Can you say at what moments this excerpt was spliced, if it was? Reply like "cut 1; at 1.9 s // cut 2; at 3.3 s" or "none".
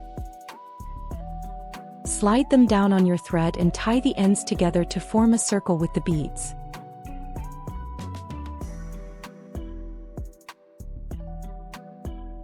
cut 1; at 2.2 s // cut 2; at 6.3 s // cut 3; at 7.9 s // cut 4; at 10.2 s